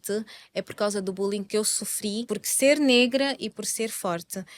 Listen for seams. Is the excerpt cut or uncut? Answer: cut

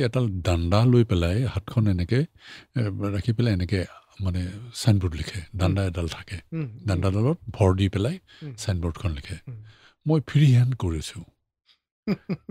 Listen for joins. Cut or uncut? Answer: uncut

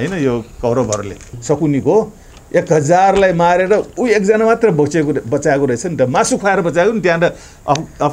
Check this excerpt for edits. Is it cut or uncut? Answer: cut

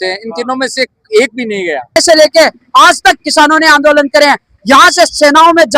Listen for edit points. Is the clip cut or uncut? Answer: cut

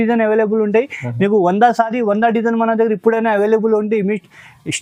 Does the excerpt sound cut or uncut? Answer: uncut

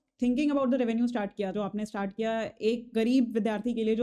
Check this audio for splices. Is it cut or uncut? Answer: cut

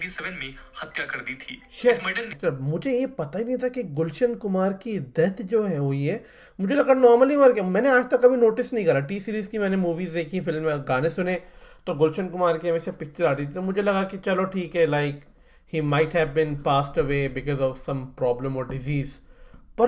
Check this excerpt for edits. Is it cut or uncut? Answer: cut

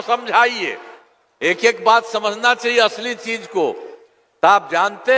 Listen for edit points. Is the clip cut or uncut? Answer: uncut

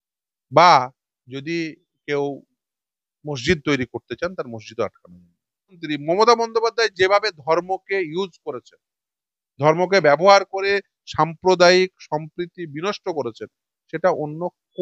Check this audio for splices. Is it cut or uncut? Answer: cut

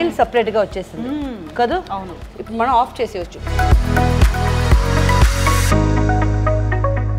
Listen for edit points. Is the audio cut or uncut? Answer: cut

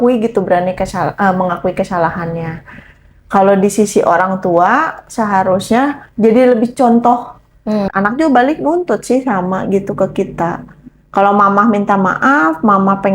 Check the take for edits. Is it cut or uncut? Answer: cut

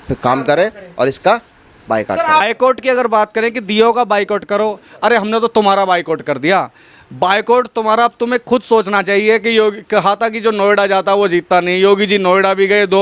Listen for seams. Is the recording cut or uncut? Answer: cut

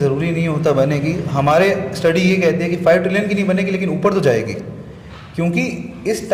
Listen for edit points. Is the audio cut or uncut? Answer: uncut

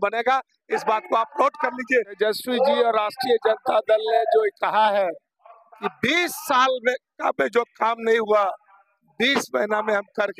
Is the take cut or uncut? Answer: cut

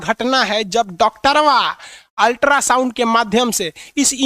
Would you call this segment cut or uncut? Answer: uncut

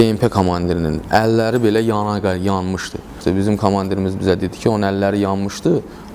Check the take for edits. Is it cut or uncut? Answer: cut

